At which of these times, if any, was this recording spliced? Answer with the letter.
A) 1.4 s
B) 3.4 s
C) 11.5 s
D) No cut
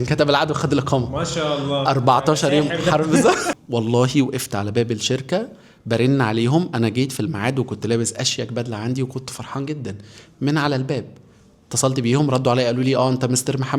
B